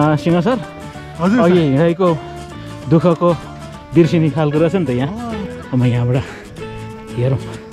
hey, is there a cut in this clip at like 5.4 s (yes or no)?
yes